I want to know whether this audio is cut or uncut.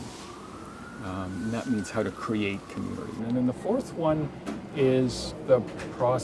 cut